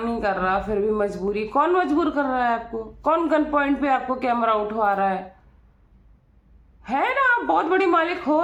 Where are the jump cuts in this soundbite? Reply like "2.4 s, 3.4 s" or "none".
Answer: none